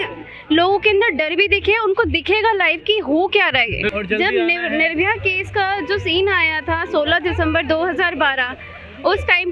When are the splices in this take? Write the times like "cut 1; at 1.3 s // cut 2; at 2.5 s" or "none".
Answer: cut 1; at 3.9 s